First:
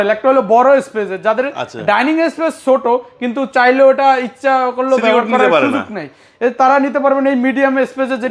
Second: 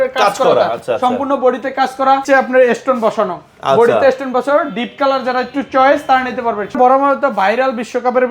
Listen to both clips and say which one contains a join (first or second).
second